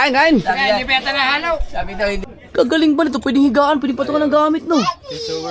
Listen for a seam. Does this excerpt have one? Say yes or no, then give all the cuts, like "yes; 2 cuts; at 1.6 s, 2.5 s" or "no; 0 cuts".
no; 0 cuts